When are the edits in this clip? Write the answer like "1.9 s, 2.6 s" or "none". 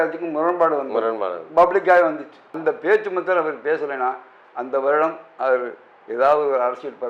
2.6 s